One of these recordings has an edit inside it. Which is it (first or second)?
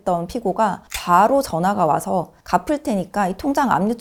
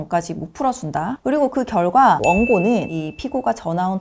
second